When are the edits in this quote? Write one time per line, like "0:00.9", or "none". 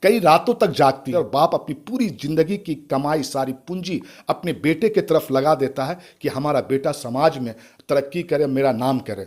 0:01.1